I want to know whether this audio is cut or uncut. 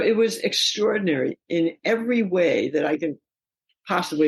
cut